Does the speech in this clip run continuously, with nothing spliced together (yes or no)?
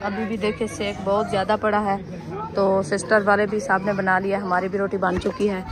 yes